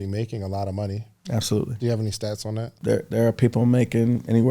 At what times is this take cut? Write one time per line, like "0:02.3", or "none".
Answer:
0:02.8